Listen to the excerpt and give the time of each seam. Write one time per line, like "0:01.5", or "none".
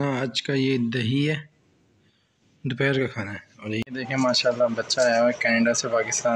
0:03.8

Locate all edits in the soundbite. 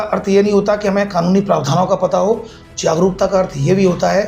none

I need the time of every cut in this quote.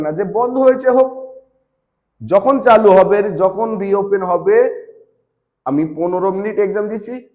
none

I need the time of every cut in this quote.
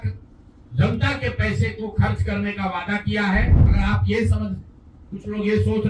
0:03.6

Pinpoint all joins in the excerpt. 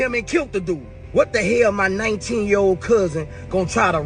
0:00.9

